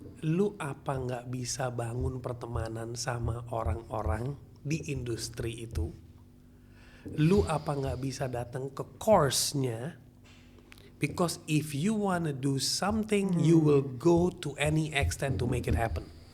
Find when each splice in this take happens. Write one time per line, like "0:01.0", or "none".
none